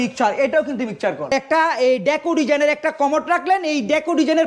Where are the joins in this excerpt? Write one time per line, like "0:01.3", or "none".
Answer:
0:01.3